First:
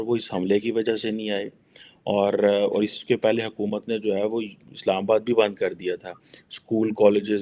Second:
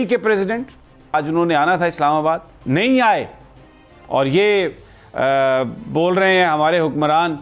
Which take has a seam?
second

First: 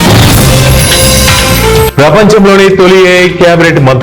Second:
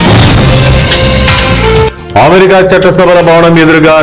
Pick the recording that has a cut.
second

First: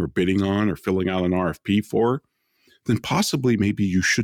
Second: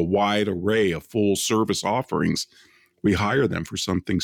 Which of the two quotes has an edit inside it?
second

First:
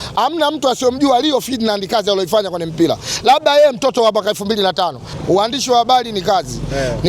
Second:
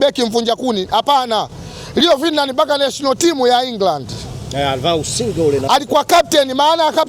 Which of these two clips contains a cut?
first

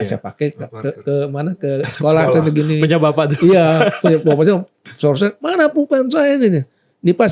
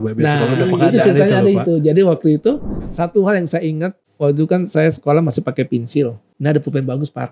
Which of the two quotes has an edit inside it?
second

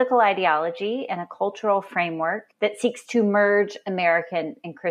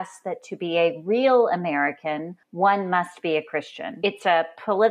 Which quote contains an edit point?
second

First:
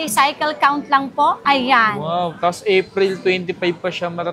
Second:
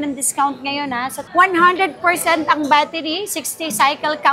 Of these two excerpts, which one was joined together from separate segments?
second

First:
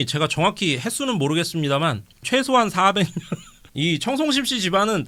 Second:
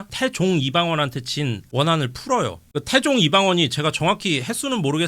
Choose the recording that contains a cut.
second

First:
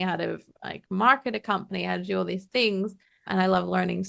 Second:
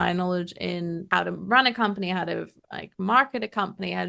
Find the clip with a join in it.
second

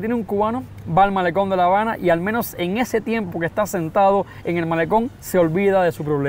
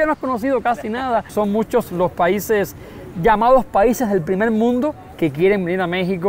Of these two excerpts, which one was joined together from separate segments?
second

